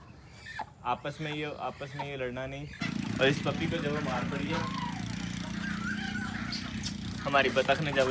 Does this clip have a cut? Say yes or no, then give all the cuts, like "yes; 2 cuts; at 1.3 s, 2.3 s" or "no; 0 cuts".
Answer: yes; 1 cut; at 2.7 s